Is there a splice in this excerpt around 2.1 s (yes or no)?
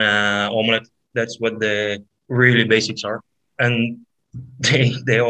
yes